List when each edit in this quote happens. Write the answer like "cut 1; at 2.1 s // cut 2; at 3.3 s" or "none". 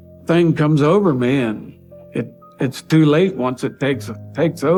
none